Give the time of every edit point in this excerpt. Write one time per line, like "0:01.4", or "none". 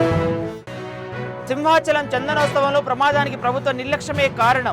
none